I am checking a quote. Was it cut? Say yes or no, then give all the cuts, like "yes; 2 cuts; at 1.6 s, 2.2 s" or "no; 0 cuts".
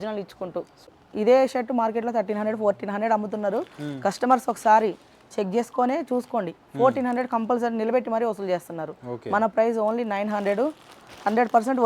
yes; 1 cut; at 1.0 s